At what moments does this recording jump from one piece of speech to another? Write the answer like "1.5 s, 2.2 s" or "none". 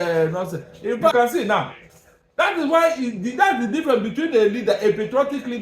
1.1 s